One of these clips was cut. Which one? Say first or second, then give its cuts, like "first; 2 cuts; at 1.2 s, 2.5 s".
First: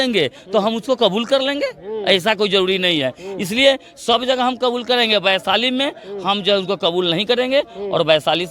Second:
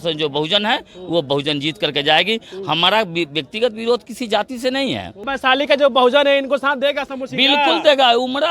second; 1 cut; at 5.2 s